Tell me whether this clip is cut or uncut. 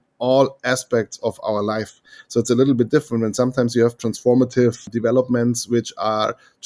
cut